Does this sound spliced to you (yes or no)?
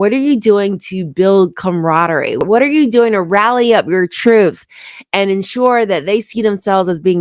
yes